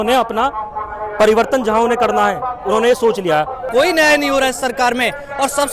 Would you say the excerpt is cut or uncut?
cut